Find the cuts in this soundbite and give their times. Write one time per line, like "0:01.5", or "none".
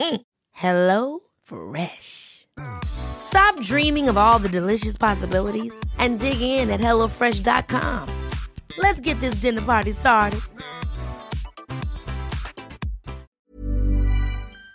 0:13.3